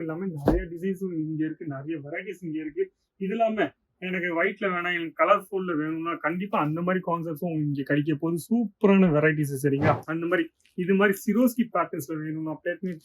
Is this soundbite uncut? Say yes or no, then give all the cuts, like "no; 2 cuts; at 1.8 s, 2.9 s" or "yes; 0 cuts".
no; 1 cut; at 10.1 s